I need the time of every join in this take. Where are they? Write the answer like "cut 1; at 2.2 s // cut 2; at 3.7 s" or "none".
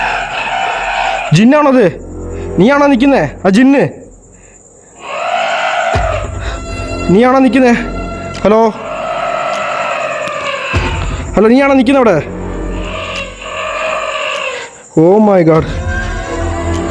cut 1; at 15.7 s